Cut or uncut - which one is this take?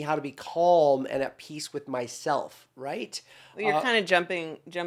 uncut